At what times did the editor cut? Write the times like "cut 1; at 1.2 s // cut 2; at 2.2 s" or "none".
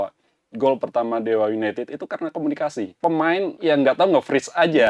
cut 1; at 2.9 s // cut 2; at 3.5 s